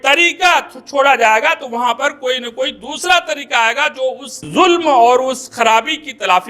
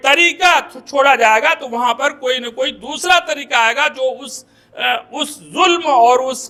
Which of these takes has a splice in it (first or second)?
first